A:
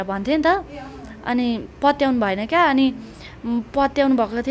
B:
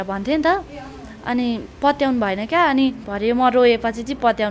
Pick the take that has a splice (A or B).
B